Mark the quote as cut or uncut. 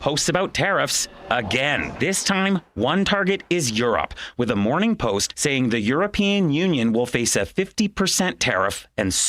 cut